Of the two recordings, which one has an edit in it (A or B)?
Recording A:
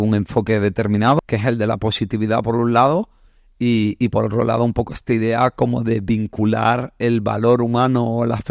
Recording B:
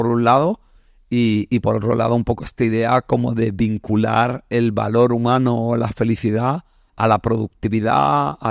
A